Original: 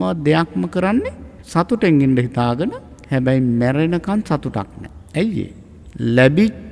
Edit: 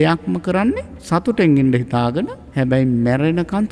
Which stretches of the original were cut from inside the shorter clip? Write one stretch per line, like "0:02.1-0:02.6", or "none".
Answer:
0:01.2-0:01.4
0:02.9-0:03.0